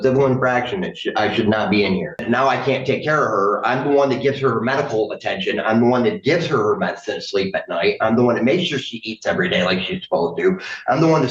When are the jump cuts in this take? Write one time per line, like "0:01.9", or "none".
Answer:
0:02.2